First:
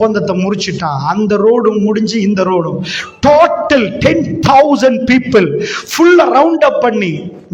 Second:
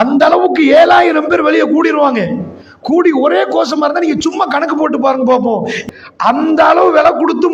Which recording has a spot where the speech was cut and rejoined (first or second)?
second